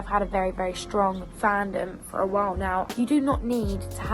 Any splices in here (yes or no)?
yes